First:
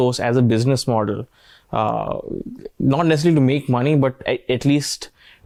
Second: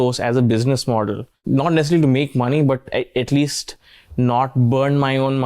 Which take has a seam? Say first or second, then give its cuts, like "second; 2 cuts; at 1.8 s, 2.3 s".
second; 1 cut; at 1.3 s